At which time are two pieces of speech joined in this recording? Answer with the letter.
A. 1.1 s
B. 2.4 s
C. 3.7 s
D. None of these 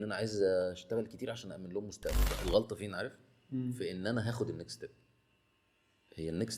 B